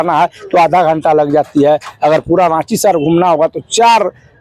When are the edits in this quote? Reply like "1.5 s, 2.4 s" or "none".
none